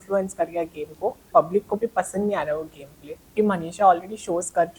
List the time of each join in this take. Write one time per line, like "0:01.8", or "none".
0:01.3
0:03.3